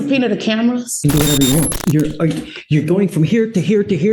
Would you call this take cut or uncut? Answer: cut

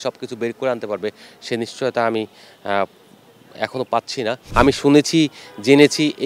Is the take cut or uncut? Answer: cut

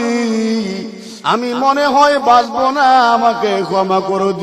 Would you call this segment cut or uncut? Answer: cut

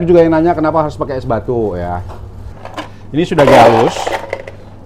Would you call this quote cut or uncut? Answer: cut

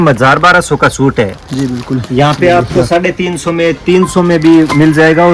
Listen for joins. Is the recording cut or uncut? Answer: uncut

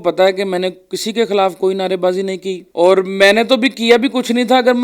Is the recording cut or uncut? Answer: cut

